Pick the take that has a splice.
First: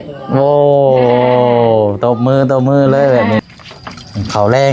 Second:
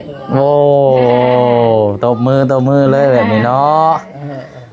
first; 1 cut; at 3.4 s

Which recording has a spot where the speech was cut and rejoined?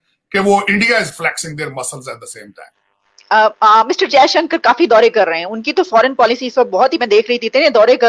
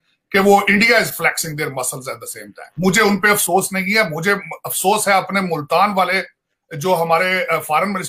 first; 1 cut; at 2.7 s

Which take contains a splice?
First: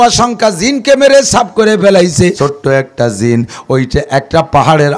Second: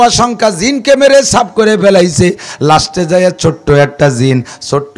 first; 1 cut; at 2.4 s

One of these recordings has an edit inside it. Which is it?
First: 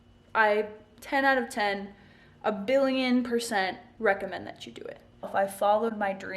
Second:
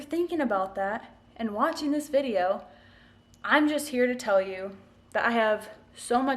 first; 1 cut; at 5.3 s

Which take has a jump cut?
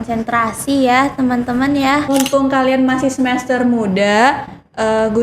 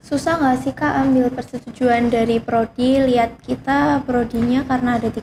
first; 1 cut; at 2.1 s

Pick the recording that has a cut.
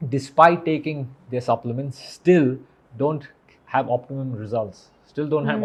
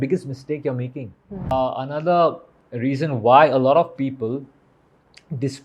second; 1 cut; at 1.5 s

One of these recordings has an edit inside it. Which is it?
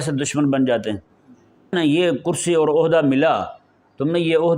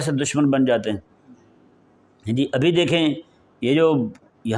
first; 1 cut; at 1.7 s

